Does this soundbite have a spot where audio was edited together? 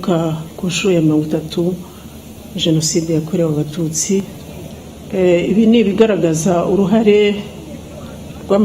yes; 1 cut; at 4.4 s

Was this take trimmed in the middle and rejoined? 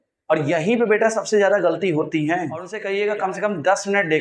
yes; 1 cut; at 2.8 s

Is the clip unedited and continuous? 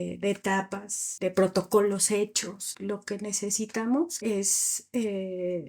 no; 3 cuts; at 1.0 s, 2.7 s, 4.1 s

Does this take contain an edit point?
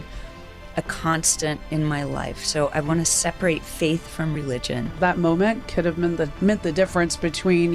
yes; 1 cut; at 5.0 s

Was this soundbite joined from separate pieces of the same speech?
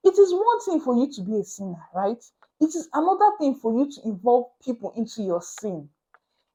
no; 0 cuts

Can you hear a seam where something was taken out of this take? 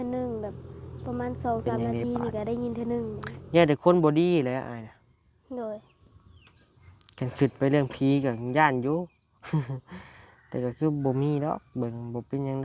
yes; 1 cut; at 3.3 s

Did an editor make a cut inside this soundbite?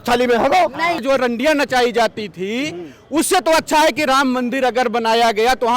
yes; 1 cut; at 1.0 s

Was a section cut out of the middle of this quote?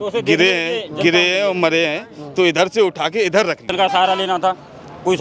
yes; 1 cut; at 3.7 s

